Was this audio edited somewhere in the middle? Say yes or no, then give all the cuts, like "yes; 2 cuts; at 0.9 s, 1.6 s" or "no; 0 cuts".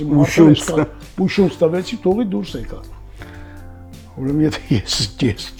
no; 0 cuts